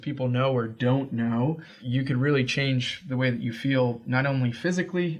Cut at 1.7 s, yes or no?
yes